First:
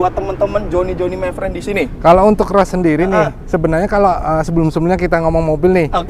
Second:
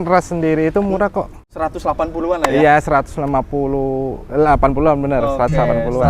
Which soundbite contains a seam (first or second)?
second